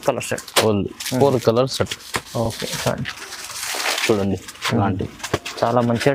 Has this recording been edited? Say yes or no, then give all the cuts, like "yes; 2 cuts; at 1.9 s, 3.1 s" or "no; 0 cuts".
no; 0 cuts